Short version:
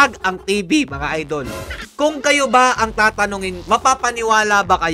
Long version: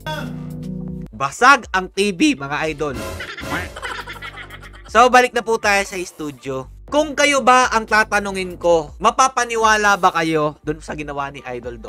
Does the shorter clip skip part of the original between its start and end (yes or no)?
yes